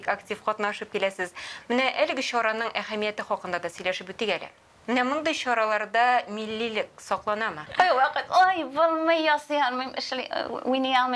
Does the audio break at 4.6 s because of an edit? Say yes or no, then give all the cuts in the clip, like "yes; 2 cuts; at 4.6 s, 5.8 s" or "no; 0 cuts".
no; 1 cut; at 7.6 s